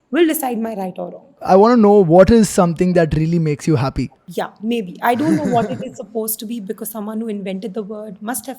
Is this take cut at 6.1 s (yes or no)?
no